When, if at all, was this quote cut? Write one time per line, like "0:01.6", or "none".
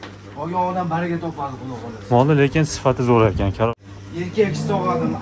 0:03.8